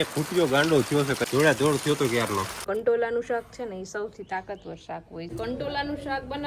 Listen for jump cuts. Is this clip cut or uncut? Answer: cut